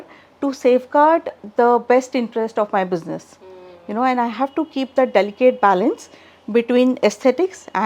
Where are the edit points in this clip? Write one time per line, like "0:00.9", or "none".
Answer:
none